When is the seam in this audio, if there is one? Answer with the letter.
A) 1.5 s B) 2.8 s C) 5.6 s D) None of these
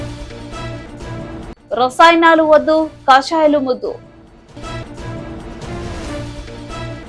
D